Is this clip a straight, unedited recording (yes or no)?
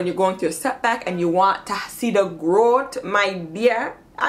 yes